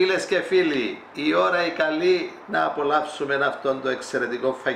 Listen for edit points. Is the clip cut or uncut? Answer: uncut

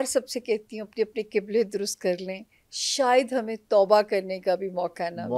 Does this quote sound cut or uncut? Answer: uncut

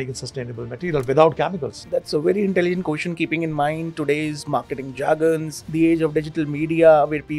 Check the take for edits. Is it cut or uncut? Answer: cut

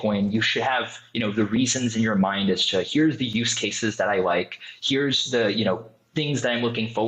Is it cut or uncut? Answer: uncut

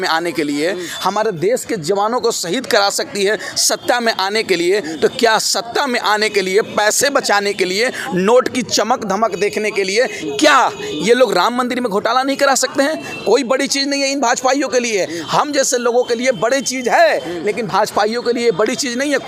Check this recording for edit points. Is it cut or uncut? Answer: uncut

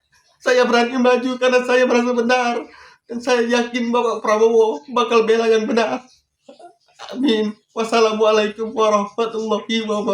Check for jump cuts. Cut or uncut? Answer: uncut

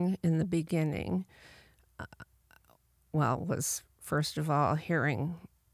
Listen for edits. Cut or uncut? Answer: uncut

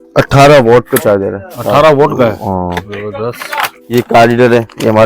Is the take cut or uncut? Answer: cut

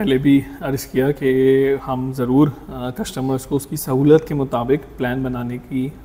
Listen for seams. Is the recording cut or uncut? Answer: uncut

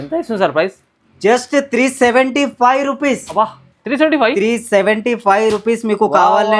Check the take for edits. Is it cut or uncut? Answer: uncut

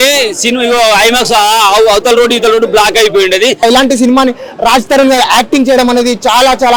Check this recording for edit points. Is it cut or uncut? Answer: cut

